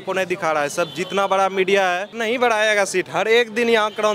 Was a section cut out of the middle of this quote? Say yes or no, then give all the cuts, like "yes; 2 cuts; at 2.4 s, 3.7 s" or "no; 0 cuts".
yes; 1 cut; at 2.2 s